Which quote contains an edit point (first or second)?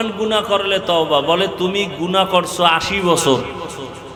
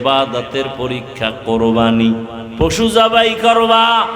second